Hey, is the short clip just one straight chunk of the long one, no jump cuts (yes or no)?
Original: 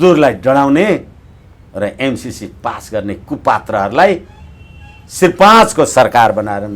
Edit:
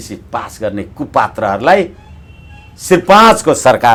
yes